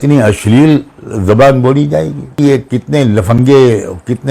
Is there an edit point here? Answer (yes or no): yes